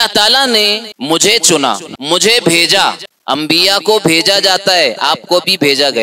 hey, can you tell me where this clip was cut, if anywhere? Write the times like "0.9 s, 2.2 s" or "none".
0.9 s, 1.9 s, 3.1 s